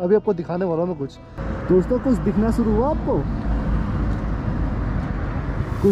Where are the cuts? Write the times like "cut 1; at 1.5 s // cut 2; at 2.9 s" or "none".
cut 1; at 1.4 s